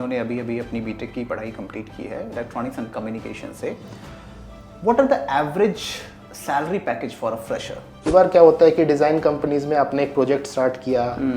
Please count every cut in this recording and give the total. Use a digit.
1